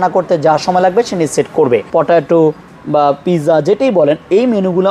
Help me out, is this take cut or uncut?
cut